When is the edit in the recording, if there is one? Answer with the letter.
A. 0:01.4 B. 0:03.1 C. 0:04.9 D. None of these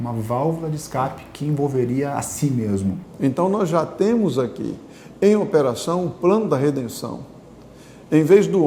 B